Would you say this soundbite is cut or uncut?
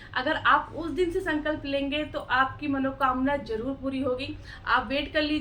uncut